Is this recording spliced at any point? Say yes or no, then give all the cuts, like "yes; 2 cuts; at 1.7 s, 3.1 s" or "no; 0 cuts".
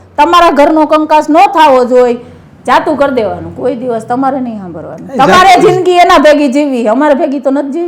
no; 0 cuts